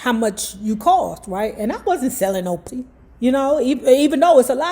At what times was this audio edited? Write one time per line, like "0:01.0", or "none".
0:02.7